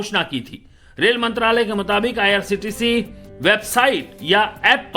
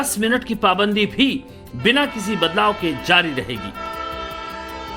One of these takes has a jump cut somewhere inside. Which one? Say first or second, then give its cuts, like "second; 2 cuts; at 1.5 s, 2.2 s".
second; 1 cut; at 2.4 s